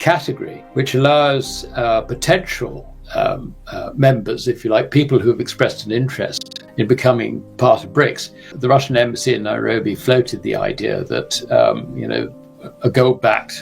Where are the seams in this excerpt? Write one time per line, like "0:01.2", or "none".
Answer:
0:08.5